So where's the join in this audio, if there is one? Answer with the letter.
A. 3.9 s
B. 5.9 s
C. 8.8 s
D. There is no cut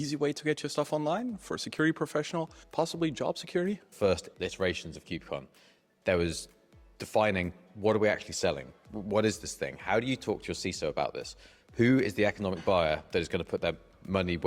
A